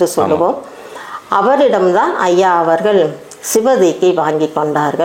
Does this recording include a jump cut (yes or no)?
no